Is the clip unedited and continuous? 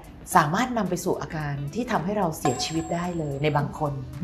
yes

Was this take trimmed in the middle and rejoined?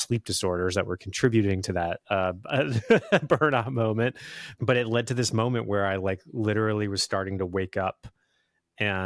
no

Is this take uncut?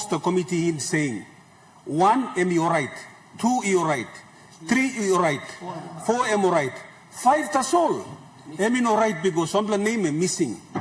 yes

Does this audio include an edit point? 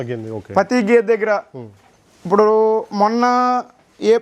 no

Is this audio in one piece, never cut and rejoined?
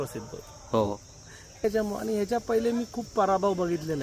no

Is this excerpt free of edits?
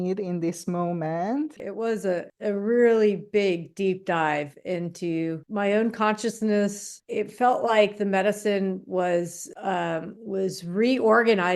no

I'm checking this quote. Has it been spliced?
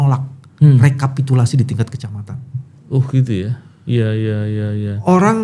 no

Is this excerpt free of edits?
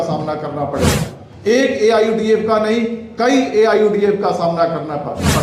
yes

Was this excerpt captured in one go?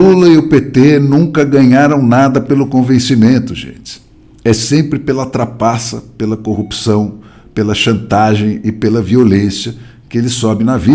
yes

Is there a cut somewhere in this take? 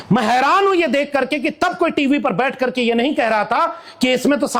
no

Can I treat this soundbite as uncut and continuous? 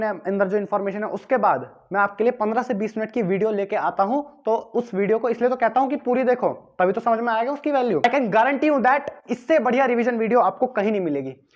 no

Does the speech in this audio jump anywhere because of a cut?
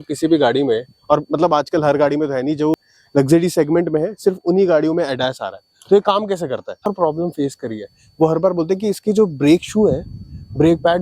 yes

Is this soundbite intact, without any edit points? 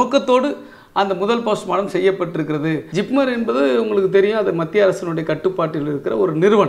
no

